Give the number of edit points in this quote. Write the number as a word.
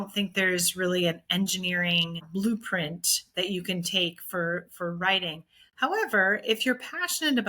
one